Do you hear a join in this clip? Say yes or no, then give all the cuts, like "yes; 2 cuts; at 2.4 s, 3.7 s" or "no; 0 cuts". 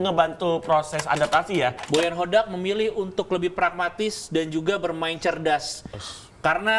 yes; 1 cut; at 1.8 s